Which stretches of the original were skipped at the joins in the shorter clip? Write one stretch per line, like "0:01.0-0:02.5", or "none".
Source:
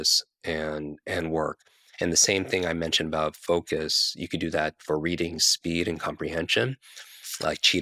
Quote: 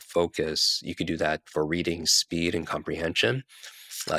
none

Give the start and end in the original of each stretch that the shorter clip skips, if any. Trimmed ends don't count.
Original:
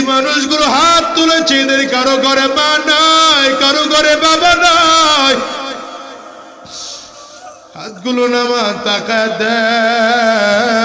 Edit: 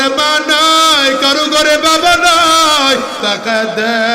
0:05.6-0:08.8

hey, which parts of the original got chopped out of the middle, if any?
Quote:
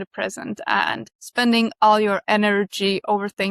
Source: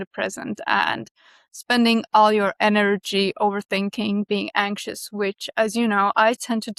0:01.1-0:01.5

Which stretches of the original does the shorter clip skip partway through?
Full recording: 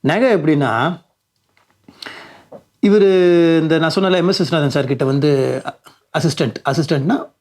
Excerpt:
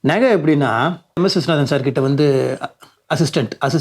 0:01.2-0:04.2

